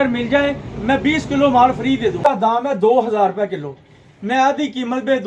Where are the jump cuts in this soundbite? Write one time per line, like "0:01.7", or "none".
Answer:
0:02.5